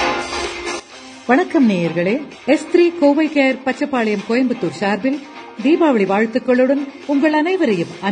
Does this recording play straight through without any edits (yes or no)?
no